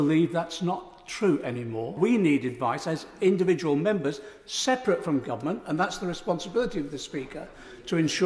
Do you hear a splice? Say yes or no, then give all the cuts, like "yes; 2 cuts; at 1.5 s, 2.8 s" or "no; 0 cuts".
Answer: yes; 1 cut; at 2.0 s